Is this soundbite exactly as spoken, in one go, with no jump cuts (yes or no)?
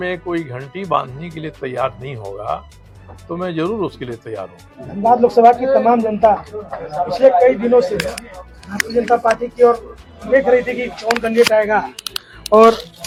yes